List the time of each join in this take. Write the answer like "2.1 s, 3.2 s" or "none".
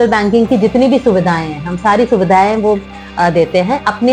none